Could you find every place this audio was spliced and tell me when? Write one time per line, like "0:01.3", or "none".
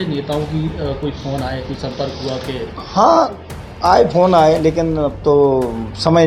none